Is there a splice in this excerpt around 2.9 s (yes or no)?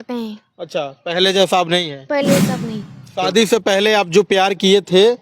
yes